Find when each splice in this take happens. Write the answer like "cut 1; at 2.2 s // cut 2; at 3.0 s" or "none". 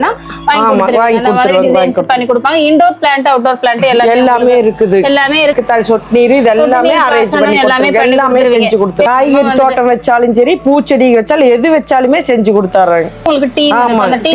cut 1; at 5.5 s // cut 2; at 9.1 s // cut 3; at 13.3 s